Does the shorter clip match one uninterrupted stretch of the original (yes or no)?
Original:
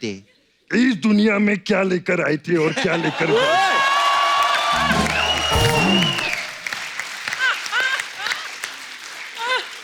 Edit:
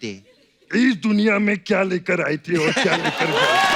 yes